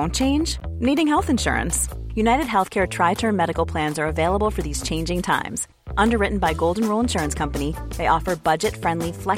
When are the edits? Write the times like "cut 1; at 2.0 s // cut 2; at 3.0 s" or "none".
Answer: none